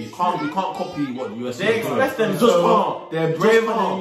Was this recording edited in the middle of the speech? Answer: no; 0 cuts

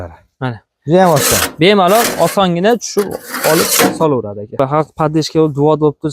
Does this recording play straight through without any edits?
no; 1 cut; at 4.6 s

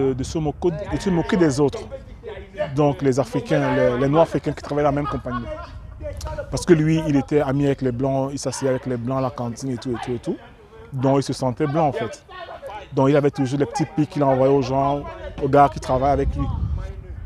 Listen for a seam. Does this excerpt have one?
no; 0 cuts

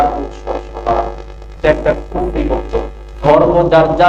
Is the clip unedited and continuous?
no; 2 cuts; at 1.6 s, 3.0 s

